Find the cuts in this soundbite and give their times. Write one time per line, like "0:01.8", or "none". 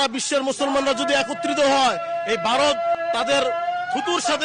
0:03.0